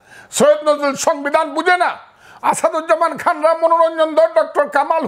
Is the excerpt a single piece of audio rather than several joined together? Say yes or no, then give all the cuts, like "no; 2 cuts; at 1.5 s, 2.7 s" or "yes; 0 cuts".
yes; 0 cuts